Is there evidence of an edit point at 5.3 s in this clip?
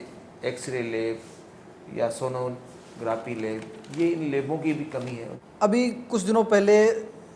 yes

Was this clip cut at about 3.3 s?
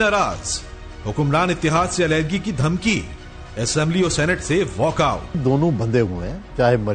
no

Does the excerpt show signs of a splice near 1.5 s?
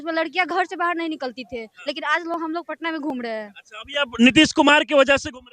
no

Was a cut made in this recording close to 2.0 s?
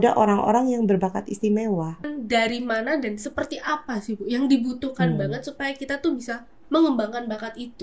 yes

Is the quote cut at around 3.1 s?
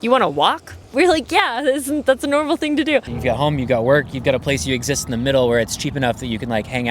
yes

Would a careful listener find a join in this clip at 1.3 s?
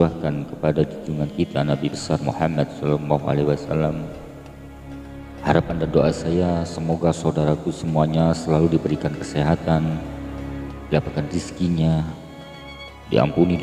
no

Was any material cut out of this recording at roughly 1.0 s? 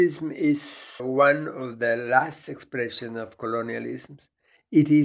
yes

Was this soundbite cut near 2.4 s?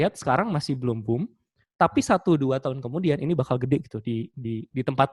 no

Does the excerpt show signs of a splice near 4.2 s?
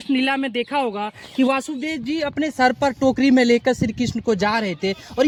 no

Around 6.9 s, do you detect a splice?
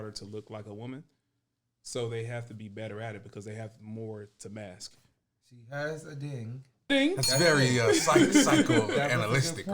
yes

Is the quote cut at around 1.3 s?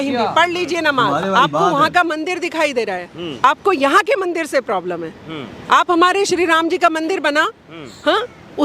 yes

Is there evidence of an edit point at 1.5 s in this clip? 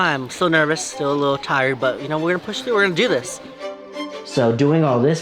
no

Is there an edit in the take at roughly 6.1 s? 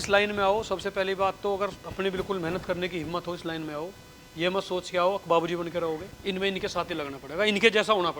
yes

